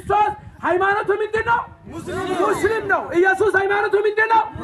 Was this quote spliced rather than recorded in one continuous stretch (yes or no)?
no